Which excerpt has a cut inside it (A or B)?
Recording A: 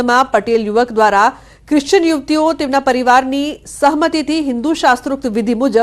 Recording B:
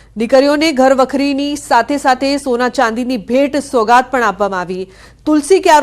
A